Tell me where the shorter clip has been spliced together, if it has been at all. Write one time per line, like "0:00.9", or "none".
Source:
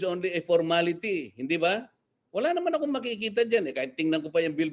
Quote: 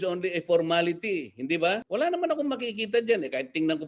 0:01.8